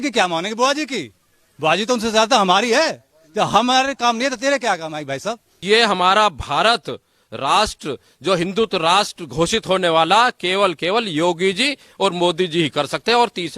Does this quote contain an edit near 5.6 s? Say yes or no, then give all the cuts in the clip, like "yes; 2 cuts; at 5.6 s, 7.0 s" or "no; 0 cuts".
yes; 1 cut; at 5.6 s